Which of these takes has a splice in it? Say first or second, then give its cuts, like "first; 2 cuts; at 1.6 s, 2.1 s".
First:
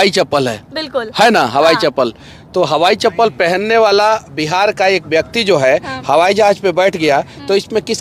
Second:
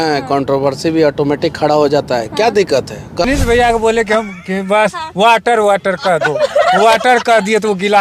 second; 1 cut; at 3.2 s